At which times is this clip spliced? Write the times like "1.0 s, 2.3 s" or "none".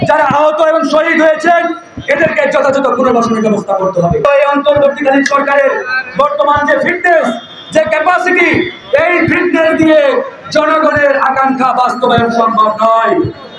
4.2 s